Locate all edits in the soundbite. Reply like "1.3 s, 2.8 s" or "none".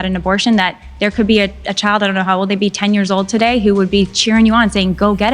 none